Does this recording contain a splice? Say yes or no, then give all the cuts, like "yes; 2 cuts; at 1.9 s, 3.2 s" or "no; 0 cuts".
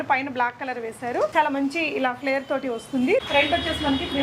yes; 2 cuts; at 1.3 s, 3.2 s